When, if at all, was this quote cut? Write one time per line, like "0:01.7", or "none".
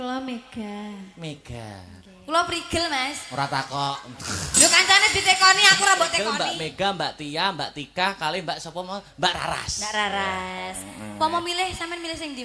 0:06.2